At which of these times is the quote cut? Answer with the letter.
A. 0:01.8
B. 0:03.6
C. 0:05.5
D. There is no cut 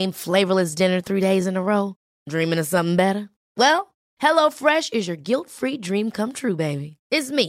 D